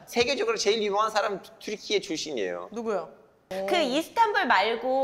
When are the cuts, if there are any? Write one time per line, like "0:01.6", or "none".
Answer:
0:03.5

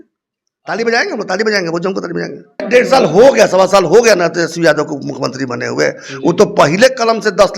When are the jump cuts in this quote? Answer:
0:02.7

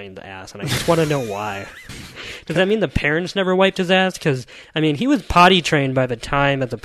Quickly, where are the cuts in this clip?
0:01.8

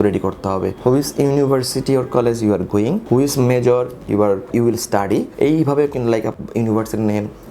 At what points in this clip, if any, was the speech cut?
0:04.5
0:06.3

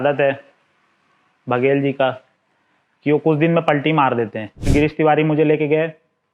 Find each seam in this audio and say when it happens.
0:04.7

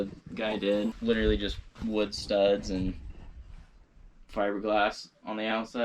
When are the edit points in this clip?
0:01.0

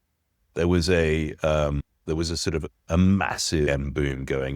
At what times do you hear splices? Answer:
0:01.9
0:03.7

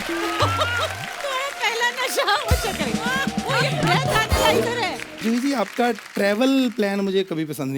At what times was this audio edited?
0:05.1

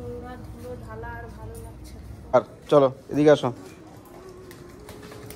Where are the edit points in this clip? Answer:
0:02.1

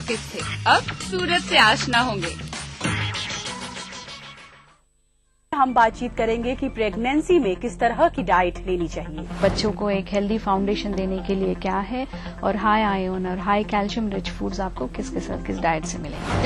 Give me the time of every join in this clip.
0:04.9

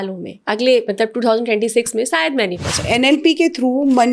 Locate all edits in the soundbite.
0:02.8

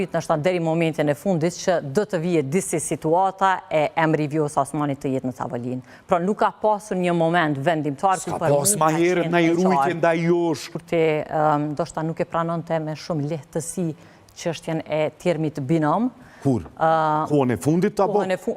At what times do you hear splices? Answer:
0:10.7

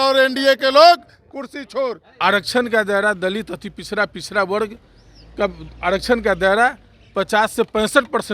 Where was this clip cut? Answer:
0:02.1

